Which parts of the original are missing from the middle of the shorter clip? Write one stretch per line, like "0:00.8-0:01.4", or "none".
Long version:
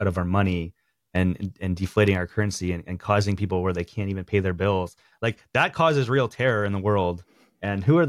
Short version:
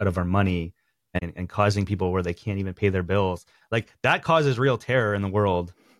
0:01.2-0:02.7